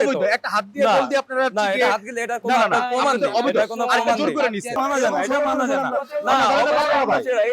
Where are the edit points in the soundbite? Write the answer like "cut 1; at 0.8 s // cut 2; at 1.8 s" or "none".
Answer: cut 1; at 4.8 s